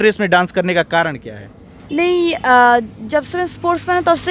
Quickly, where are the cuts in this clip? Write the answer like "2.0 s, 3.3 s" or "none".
none